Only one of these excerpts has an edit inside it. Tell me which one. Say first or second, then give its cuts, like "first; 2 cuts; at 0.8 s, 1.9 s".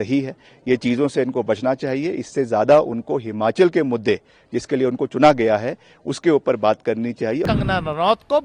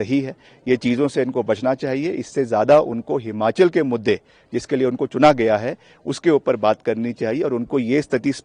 first; 1 cut; at 7.4 s